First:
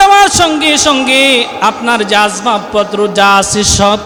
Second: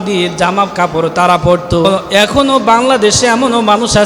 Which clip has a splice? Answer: second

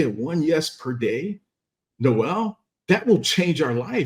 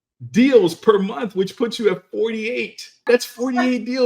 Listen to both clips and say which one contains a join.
second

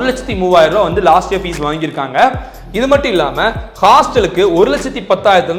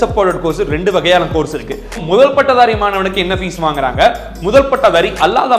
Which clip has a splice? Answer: second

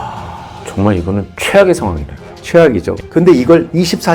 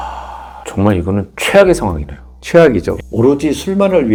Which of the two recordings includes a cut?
first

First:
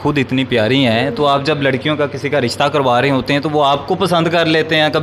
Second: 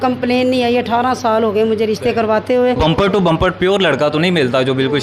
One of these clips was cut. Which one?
second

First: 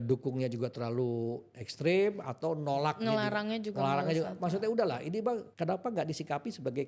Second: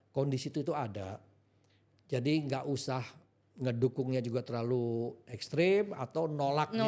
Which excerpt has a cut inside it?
first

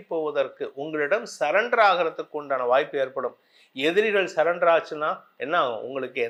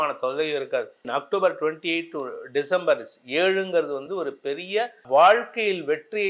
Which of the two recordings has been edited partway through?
second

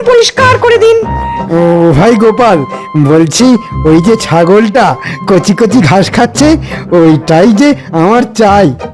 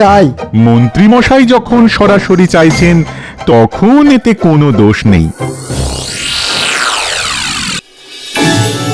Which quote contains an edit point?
second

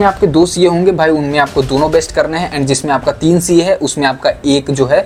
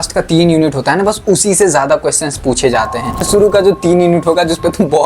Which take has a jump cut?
second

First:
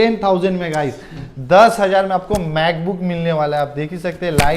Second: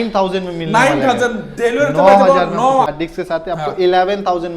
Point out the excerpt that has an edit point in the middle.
second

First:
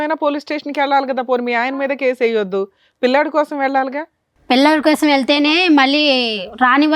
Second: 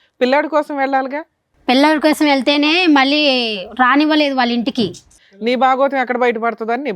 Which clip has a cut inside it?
second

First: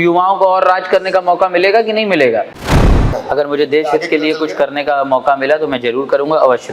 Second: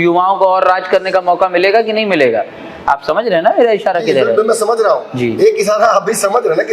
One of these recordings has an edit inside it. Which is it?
first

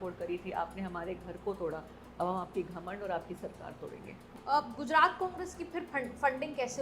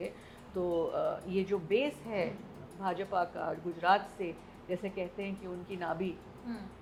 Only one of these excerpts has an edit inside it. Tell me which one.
first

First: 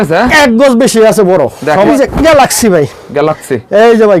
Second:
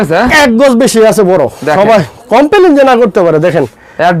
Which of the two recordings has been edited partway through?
first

